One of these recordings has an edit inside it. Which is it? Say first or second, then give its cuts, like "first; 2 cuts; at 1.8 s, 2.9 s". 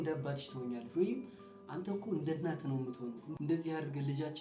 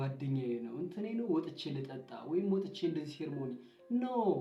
first; 1 cut; at 3.2 s